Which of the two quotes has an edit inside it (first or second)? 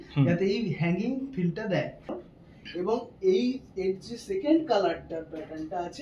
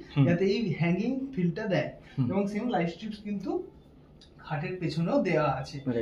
first